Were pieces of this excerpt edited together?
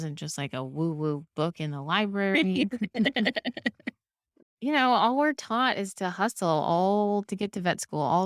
no; 0 cuts

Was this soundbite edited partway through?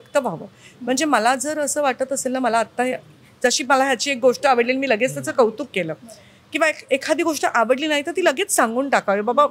no; 0 cuts

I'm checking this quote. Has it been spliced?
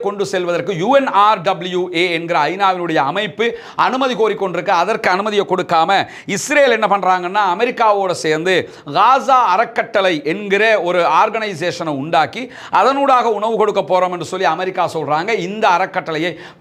no; 0 cuts

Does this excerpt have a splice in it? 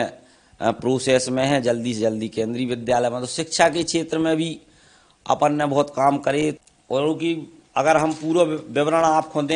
yes; 1 cut; at 6.7 s

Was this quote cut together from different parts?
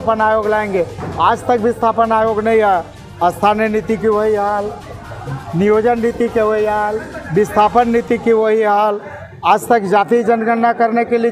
no; 0 cuts

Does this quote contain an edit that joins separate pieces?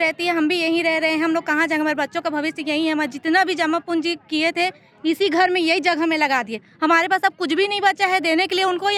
no; 0 cuts

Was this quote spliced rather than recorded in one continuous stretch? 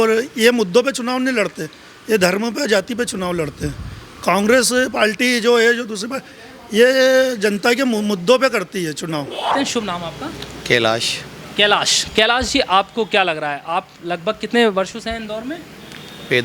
no; 0 cuts

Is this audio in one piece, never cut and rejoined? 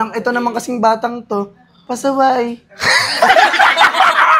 yes; 0 cuts

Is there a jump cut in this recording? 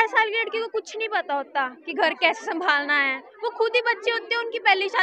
no; 0 cuts

